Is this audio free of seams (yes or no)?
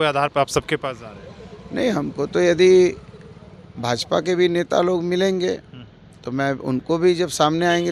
yes